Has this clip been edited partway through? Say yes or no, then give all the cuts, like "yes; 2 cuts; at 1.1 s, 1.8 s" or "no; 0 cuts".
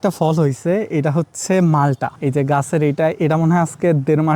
no; 0 cuts